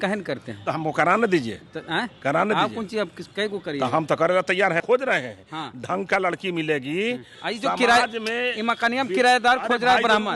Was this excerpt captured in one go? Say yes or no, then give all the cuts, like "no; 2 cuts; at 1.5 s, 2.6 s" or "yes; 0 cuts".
no; 2 cuts; at 4.8 s, 7.3 s